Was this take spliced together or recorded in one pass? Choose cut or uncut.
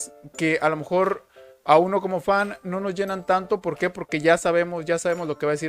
uncut